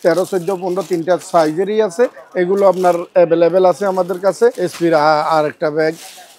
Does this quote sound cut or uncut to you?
cut